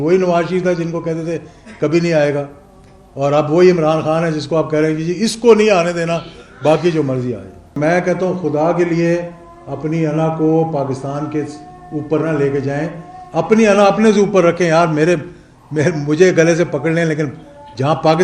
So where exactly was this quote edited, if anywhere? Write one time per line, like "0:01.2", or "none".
0:07.8

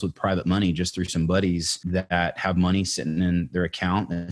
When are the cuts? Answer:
0:01.8

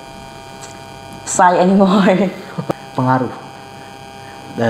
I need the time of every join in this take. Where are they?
0:02.7

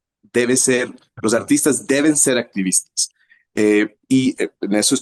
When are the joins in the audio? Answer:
none

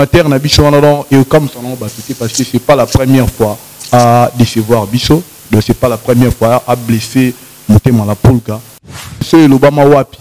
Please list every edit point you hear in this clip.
0:08.9

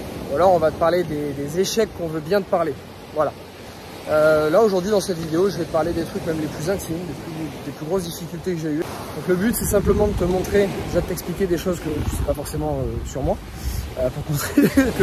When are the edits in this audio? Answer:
0:08.8

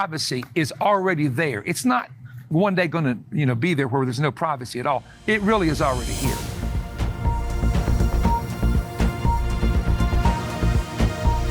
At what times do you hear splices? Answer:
0:06.0

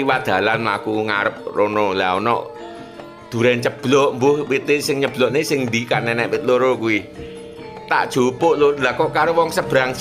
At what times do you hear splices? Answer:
none

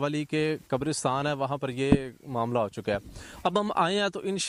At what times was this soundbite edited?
none

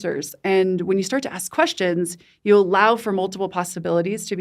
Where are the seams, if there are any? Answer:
none

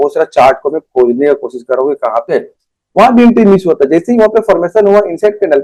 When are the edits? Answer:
0:02.3

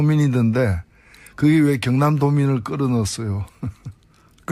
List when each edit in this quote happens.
0:01.5

